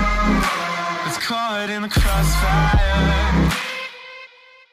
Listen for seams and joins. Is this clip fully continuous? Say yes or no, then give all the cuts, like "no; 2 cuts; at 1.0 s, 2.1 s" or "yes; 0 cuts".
no; 1 cut; at 1.0 s